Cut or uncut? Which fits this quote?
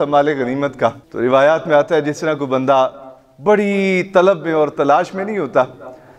cut